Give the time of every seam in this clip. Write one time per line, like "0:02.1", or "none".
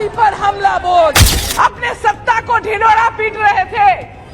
0:01.3